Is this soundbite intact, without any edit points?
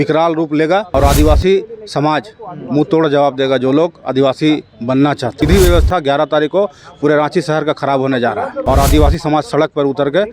no; 3 cuts; at 0.9 s, 5.4 s, 8.6 s

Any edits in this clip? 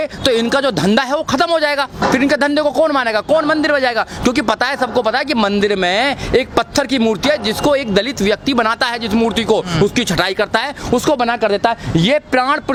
no; 0 cuts

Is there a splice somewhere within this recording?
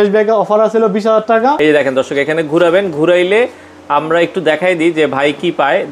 yes; 1 cut; at 1.6 s

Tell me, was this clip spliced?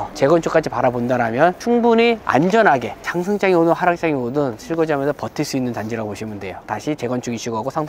no; 0 cuts

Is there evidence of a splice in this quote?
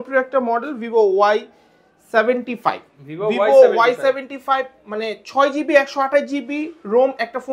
no; 0 cuts

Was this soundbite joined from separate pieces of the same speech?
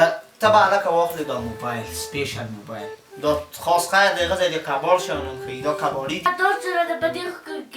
yes; 1 cut; at 6.2 s

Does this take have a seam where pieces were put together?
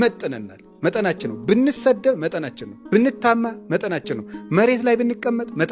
no; 0 cuts

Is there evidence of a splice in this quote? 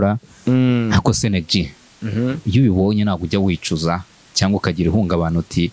no; 0 cuts

